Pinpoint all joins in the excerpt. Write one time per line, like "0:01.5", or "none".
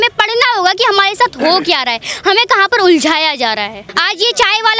0:03.9